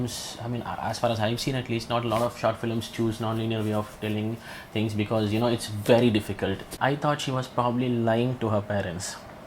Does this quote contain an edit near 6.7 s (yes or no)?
yes